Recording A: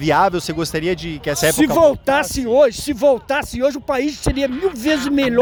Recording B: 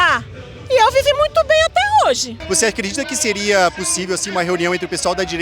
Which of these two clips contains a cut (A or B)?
B